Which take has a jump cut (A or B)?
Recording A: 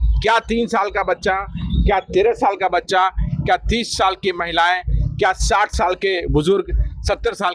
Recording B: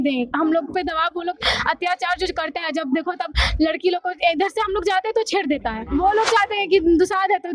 B